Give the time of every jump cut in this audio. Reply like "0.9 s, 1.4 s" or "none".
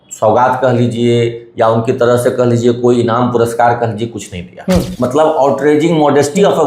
4.9 s